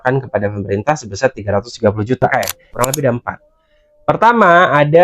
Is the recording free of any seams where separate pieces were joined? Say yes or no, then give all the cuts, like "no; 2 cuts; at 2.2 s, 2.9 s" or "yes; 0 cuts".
no; 1 cut; at 2.3 s